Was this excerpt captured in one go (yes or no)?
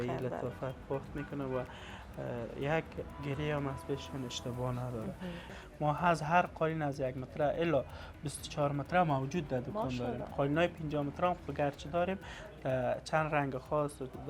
no